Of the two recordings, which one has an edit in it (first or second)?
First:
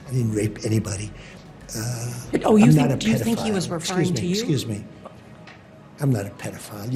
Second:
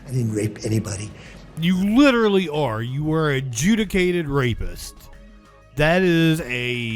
second